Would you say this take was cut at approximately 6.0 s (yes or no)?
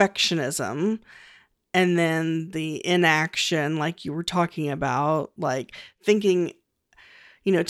yes